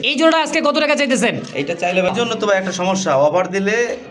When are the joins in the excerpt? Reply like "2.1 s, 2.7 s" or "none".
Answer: 2.1 s